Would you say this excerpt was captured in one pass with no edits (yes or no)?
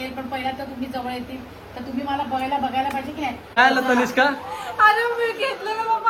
no